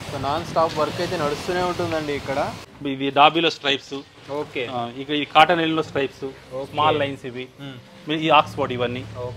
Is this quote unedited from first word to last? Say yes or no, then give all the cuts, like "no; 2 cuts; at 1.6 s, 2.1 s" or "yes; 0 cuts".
no; 1 cut; at 2.7 s